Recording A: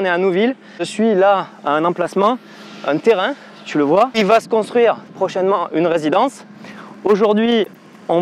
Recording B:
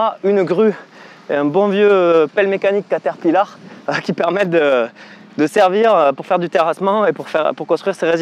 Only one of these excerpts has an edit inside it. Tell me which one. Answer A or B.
A